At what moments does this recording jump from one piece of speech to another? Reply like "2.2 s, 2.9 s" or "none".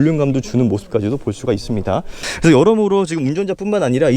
2.3 s